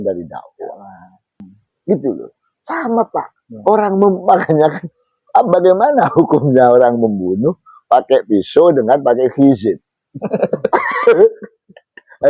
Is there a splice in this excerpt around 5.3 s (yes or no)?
no